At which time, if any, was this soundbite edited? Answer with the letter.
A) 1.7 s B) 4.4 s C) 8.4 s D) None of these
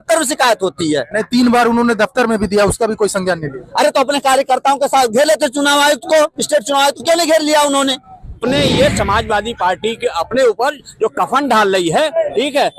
C